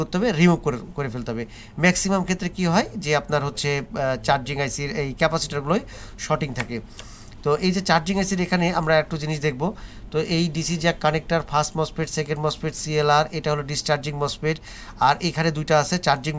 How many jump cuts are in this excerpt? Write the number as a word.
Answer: zero